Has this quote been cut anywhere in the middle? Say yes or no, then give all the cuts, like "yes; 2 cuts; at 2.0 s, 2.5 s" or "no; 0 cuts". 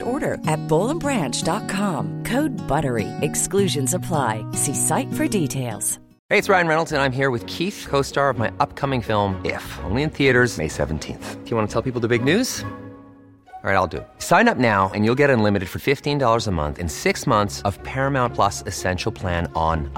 yes; 1 cut; at 6.1 s